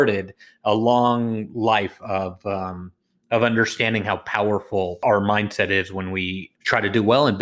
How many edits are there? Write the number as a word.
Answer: two